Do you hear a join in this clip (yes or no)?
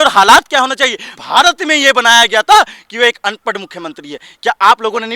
yes